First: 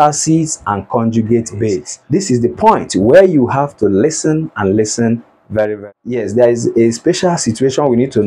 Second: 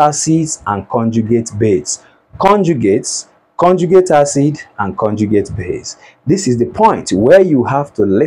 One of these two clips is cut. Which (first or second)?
first